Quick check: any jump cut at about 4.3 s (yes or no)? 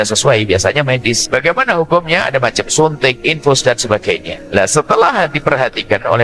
yes